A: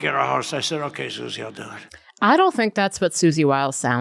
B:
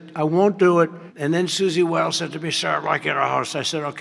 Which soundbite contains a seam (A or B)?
B